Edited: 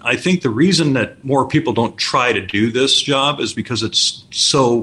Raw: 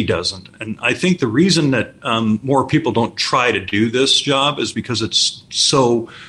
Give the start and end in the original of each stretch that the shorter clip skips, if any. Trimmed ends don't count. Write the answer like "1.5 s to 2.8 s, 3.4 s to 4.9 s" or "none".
2.0 s to 2.4 s